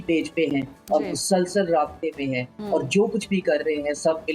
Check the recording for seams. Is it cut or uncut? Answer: uncut